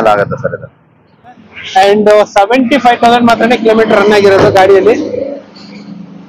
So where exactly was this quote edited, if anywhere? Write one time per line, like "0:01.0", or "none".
0:01.5